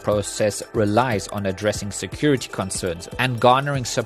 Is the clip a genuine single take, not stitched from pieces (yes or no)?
no